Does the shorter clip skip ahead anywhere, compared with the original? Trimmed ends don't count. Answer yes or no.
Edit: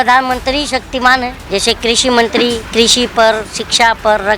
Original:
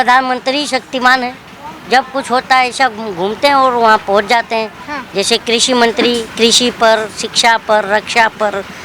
yes